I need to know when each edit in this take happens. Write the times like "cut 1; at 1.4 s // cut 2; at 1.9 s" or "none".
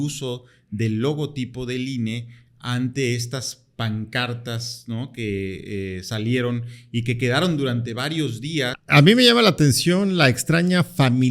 cut 1; at 8.8 s